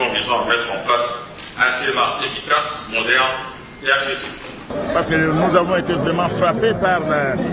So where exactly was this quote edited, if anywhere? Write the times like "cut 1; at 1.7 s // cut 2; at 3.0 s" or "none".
cut 1; at 4.7 s